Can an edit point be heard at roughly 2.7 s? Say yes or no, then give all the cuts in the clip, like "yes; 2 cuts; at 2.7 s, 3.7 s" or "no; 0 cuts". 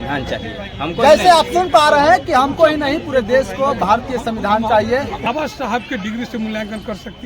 no; 1 cut; at 5.3 s